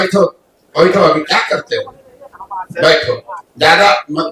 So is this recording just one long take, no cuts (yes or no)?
yes